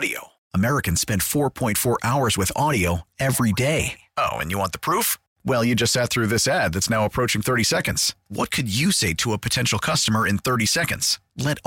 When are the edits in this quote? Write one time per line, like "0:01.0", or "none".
none